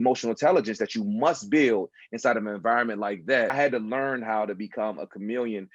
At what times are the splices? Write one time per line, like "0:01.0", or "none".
0:03.5